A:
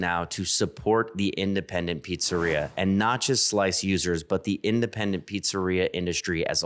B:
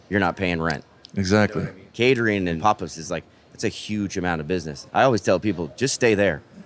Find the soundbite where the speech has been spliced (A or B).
B